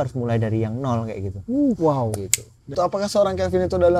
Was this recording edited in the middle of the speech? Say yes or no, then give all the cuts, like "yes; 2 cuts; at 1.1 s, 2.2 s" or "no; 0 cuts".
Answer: yes; 1 cut; at 2.8 s